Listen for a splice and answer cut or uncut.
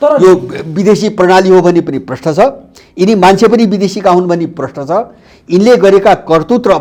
uncut